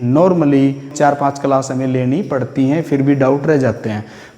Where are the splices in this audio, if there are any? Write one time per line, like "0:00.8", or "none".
0:00.9